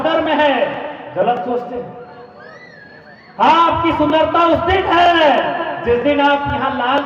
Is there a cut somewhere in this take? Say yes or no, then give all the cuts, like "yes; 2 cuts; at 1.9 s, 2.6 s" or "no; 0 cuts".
no; 0 cuts